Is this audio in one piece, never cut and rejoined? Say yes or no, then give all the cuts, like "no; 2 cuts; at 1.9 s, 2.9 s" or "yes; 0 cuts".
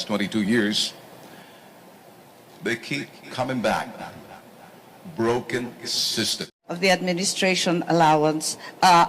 no; 1 cut; at 6.7 s